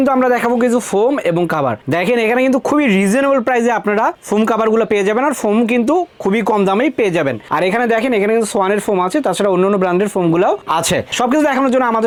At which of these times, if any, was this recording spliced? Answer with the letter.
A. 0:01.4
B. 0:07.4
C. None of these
C